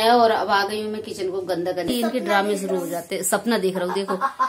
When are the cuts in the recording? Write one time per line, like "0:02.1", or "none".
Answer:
0:01.9